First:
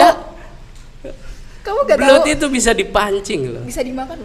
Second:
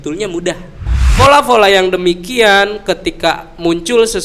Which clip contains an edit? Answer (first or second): second